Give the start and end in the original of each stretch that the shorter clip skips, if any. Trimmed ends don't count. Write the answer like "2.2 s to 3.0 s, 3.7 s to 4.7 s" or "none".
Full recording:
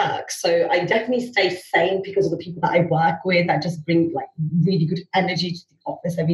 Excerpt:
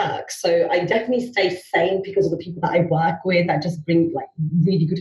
none

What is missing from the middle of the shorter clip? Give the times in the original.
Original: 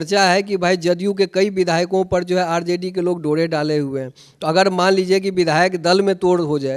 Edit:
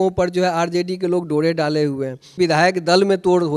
4.3 s to 5.3 s

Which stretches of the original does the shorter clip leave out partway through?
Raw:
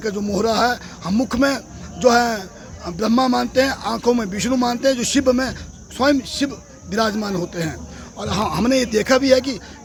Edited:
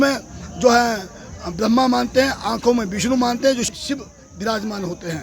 5.1 s to 6.2 s

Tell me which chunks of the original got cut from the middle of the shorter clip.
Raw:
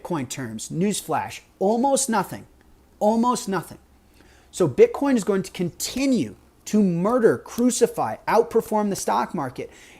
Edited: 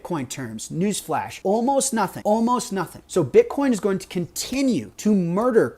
1.3 s to 1.5 s, 2.3 s to 2.9 s, 3.7 s to 4.4 s, 6.4 s to 6.6 s

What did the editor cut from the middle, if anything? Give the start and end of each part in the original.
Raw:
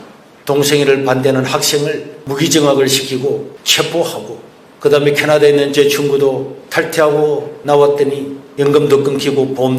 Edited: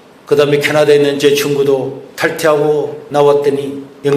none

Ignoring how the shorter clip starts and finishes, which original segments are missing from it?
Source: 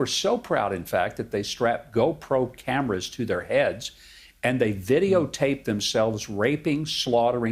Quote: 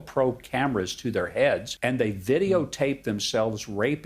3.8 s to 4.3 s

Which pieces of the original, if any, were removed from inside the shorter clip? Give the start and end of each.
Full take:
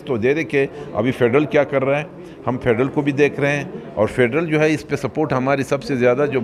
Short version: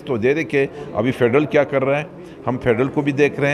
none

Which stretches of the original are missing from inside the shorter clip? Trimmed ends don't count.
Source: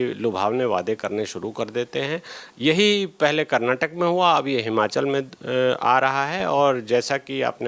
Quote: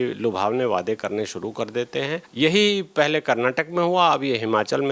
2.3 s to 2.5 s

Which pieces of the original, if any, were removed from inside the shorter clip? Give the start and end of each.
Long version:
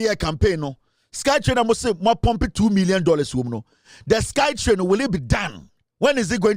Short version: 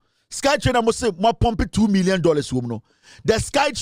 none

